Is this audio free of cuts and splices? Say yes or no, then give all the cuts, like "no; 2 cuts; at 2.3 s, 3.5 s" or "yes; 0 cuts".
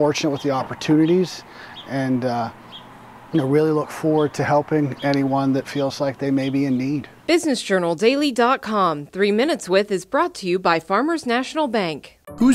no; 1 cut; at 7.1 s